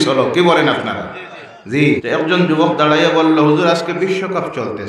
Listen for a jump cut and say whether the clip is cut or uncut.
cut